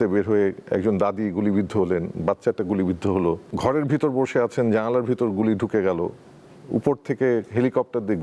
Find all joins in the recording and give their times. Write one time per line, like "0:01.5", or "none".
0:03.5